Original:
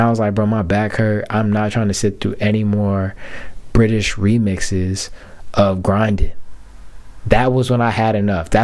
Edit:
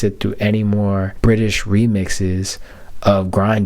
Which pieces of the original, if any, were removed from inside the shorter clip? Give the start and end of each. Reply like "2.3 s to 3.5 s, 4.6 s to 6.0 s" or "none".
3.1 s to 3.6 s